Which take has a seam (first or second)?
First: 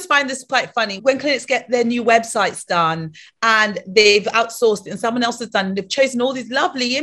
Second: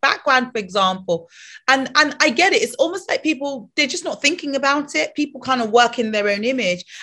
first